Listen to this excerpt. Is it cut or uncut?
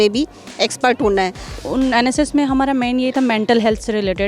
cut